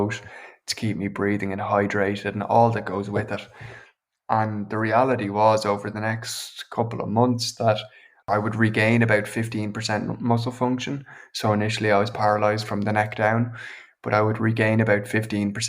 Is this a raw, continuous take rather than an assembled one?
no; 1 cut; at 8.3 s

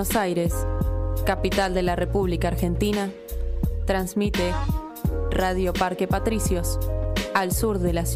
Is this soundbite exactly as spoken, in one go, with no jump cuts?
yes; 0 cuts

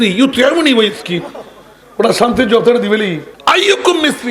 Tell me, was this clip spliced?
yes; 1 cut; at 3.3 s

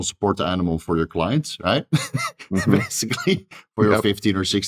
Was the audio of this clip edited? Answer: no; 0 cuts

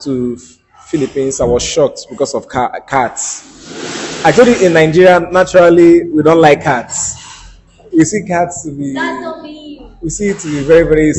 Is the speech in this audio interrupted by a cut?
no; 0 cuts

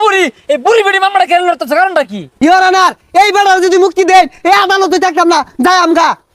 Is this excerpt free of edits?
no; 1 cut; at 2.2 s

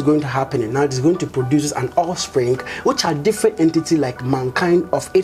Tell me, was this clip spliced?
no; 0 cuts

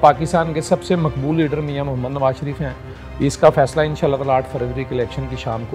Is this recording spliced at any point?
no; 0 cuts

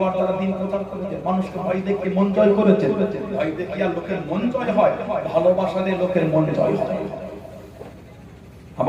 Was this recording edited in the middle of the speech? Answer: no; 0 cuts

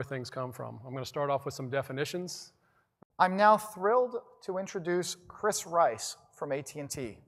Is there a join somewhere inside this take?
no; 0 cuts

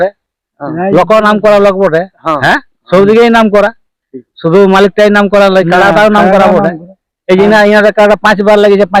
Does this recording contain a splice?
no; 0 cuts

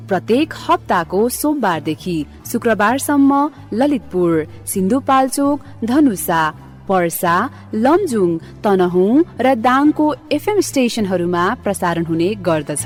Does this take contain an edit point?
no; 0 cuts

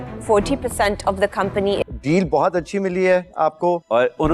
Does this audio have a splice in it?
yes; 1 cut; at 1.9 s

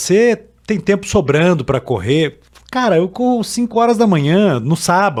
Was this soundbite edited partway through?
no; 0 cuts

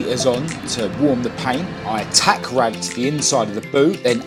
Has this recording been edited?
no; 0 cuts

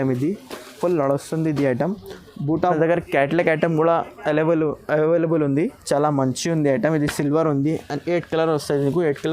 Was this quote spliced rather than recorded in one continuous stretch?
yes; 1 cut; at 2.6 s

